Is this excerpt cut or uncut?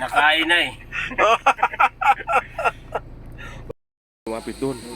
cut